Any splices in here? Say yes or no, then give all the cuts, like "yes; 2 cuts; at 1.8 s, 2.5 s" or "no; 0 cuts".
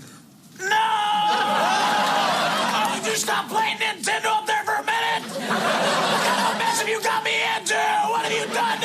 yes; 1 cut; at 2.6 s